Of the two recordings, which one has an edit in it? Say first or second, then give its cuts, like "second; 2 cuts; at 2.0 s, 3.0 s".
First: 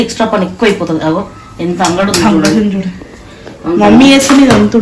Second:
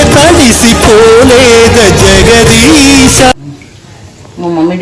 second; 1 cut; at 3.3 s